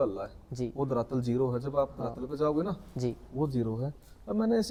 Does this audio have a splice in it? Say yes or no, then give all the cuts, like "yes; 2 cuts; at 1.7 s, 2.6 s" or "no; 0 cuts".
no; 0 cuts